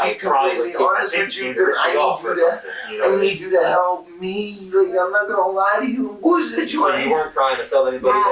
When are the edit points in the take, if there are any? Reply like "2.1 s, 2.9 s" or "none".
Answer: 6.9 s